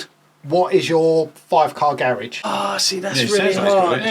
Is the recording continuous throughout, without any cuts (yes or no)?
no